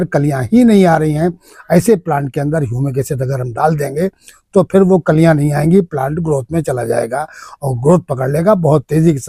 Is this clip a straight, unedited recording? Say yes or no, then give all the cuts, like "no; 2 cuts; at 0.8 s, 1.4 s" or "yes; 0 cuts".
yes; 0 cuts